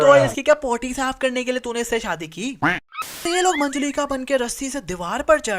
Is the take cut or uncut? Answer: cut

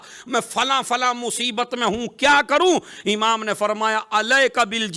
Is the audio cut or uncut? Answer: uncut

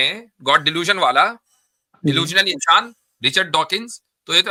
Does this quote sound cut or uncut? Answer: uncut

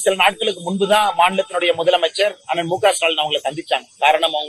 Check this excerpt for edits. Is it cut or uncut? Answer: uncut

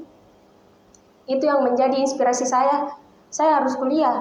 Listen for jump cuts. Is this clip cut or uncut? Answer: uncut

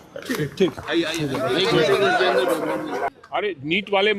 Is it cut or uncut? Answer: cut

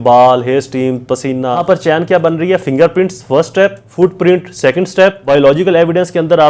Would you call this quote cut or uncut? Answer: cut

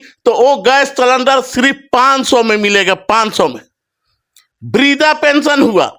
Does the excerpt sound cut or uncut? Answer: uncut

